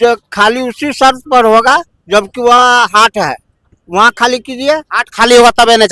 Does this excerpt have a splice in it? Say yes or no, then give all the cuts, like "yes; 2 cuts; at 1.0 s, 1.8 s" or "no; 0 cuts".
no; 0 cuts